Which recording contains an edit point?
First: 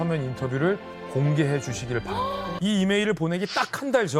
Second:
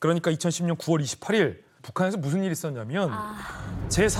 first; 1 cut; at 2.5 s

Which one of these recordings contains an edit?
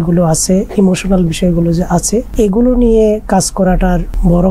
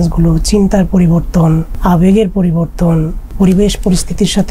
second; 2 cuts; at 1.7 s, 3.3 s

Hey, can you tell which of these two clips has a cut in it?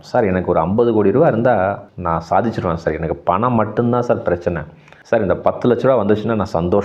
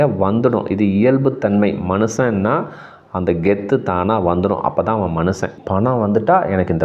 second; 1 cut; at 5.5 s

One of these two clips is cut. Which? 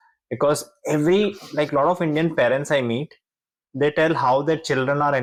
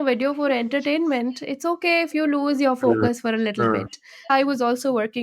second; 1 cut; at 4.3 s

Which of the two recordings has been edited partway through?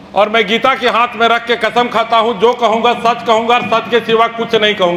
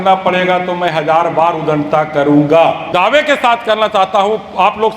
second; 1 cut; at 2.8 s

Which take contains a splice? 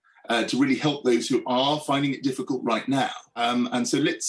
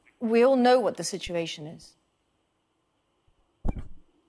first; 1 cut; at 3.2 s

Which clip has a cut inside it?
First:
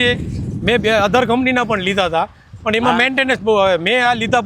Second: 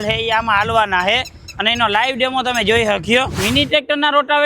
second; 1 cut; at 3.5 s

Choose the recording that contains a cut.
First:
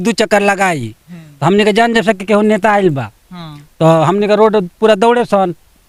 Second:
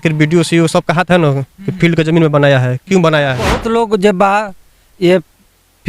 second; 1 cut; at 3.6 s

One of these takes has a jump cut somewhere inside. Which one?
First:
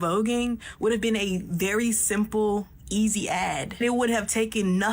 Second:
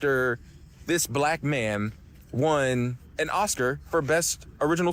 first; 1 cut; at 3.7 s

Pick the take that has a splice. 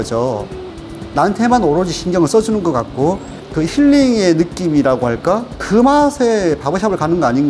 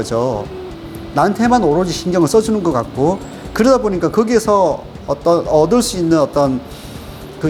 first; 2 cuts; at 3.3 s, 5.5 s

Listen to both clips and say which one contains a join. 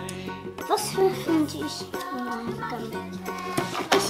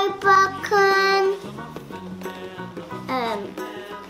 first; 1 cut; at 1.0 s

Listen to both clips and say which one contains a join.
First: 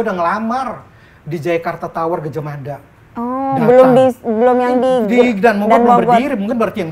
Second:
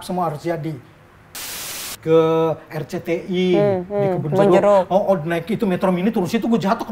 second; 1 cut; at 1.6 s

